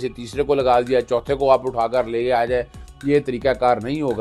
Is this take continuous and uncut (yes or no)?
yes